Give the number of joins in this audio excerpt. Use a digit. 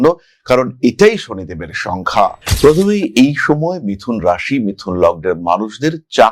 1